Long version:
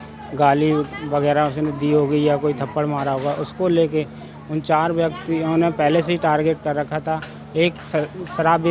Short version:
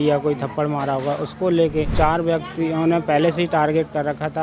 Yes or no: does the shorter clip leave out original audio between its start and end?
yes